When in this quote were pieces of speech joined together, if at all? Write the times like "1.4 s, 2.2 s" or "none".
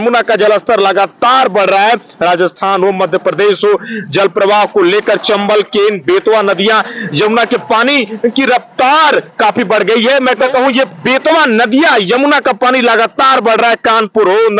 10.5 s